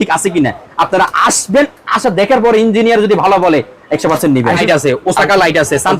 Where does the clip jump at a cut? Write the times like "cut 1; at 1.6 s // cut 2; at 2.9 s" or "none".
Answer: cut 1; at 4.6 s